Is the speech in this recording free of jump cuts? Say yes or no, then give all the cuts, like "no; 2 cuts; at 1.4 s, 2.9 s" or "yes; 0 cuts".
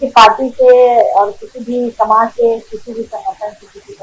yes; 0 cuts